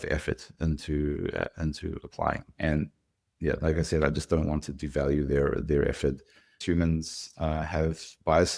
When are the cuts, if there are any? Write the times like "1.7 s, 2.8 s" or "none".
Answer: 6.6 s